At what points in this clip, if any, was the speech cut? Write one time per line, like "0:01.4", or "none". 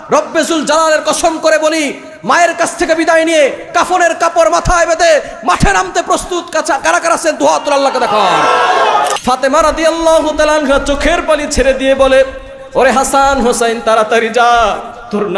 0:09.1